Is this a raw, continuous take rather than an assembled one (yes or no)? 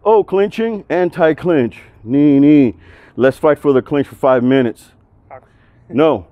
yes